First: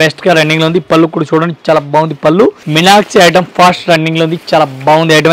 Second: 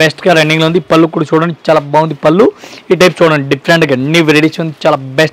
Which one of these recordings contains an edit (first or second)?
first